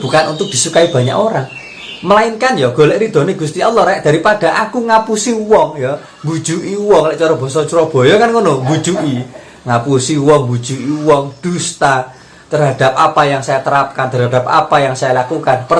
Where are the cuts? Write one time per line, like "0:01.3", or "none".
none